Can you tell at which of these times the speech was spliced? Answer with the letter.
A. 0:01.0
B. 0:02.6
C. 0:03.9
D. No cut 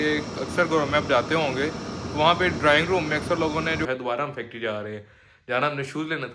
C